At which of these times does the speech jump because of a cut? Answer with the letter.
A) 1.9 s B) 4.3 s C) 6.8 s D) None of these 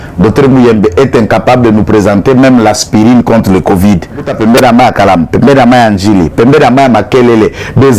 B